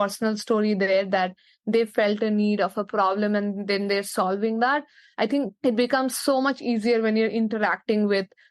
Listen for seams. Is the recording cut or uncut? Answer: cut